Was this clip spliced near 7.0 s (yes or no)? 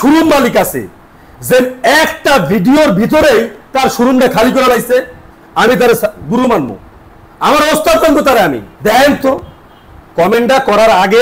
no